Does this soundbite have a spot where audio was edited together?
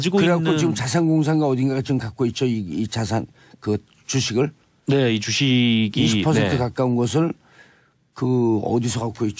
yes; 1 cut; at 4.1 s

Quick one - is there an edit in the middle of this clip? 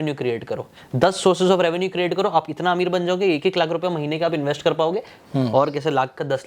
yes; 1 cut; at 5.2 s

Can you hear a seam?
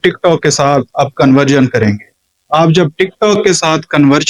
no; 0 cuts

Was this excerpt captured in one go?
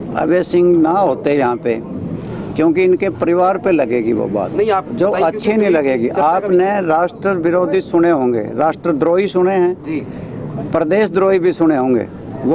yes; 0 cuts

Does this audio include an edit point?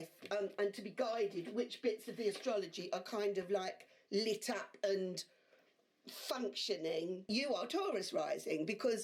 yes; 1 cut; at 7.3 s

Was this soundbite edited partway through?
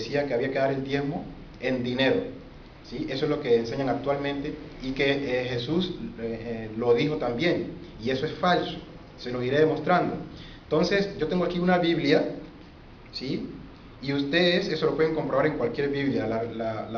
yes; 1 cut; at 2.8 s

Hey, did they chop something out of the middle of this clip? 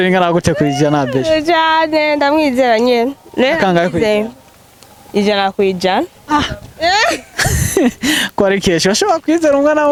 no; 0 cuts

